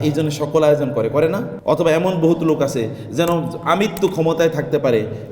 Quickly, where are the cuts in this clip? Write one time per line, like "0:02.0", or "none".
0:01.5